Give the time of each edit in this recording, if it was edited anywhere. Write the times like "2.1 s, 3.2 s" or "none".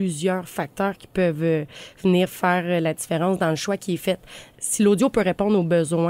4.4 s